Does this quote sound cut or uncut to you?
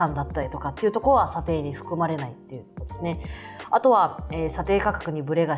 uncut